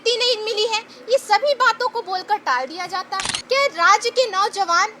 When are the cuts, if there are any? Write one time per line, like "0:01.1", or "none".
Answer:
0:03.3